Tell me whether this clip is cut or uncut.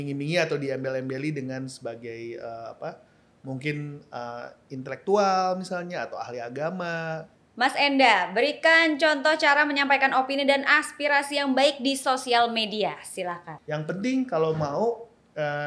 cut